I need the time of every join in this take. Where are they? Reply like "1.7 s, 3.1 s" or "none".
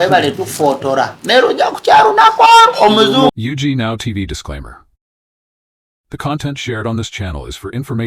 3.3 s